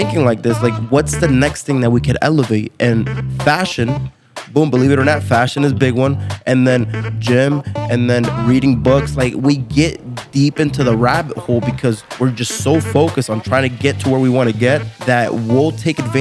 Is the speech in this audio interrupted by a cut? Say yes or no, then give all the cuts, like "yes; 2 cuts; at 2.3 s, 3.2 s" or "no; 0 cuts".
yes; 1 cut; at 14.9 s